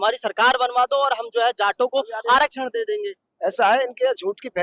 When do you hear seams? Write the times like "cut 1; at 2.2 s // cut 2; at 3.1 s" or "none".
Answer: none